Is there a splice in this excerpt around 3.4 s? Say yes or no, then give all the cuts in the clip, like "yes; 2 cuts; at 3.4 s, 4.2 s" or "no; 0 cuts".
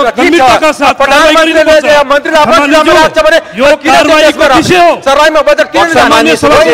no; 0 cuts